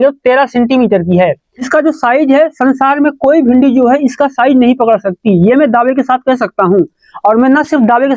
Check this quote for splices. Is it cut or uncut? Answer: cut